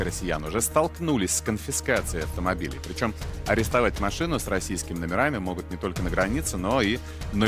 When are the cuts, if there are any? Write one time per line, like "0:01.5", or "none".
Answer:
none

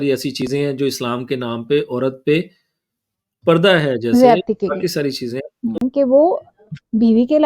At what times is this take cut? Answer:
0:05.8

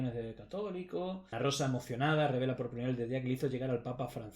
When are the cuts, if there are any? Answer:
0:01.3

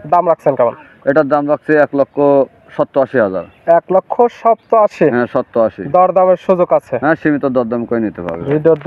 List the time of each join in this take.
none

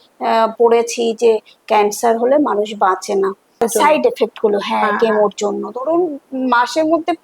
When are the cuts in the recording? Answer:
0:03.6

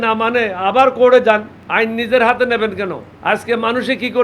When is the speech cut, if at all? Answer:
0:01.6
0:03.1

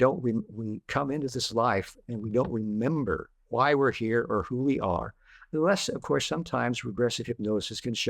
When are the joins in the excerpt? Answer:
0:03.4

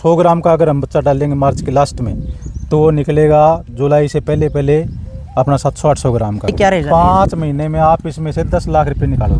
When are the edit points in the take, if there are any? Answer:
0:06.5

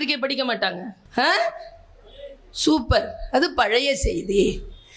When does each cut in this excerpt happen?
0:01.0

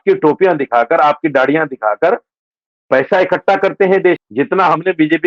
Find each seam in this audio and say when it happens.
0:04.2

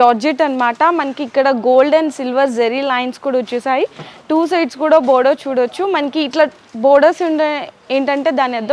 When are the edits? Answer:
none

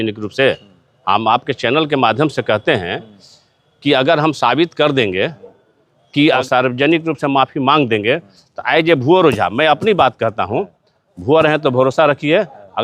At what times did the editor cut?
0:06.4

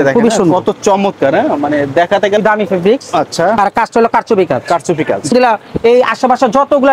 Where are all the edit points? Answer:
0:02.4
0:05.3

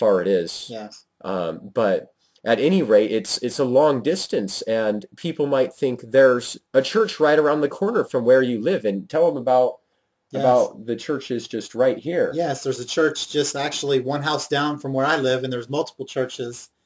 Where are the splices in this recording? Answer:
none

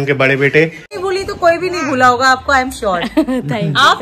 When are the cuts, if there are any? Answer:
0:00.9

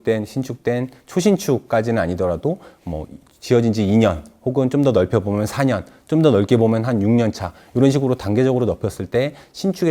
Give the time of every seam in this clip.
none

